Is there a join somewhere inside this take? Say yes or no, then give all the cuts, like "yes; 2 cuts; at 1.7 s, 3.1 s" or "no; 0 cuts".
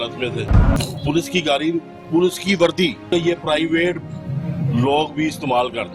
yes; 2 cuts; at 0.8 s, 3.1 s